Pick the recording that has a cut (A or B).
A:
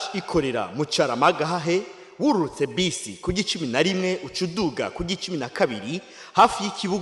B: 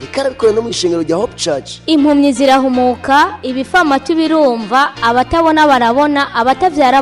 B